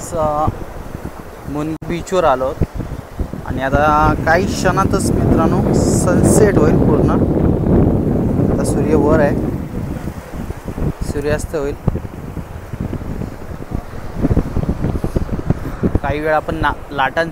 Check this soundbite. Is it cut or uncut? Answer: cut